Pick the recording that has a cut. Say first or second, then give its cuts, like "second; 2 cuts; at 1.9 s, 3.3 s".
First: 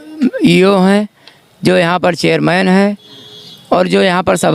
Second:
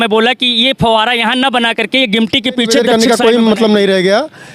second; 1 cut; at 2.8 s